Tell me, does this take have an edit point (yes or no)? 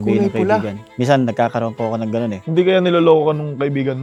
no